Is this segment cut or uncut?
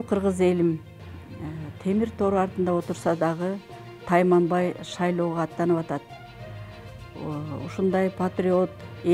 uncut